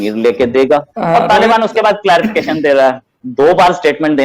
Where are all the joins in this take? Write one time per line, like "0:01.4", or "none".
0:00.9
0:03.2